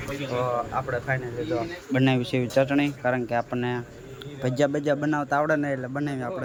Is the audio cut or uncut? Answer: uncut